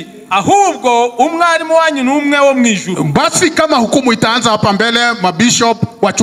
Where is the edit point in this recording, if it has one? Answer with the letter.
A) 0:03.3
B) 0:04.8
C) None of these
C